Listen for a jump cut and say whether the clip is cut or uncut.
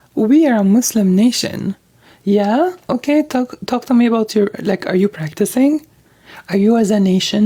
uncut